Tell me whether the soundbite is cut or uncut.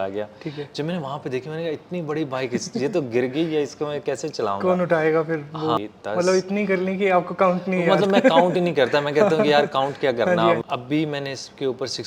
cut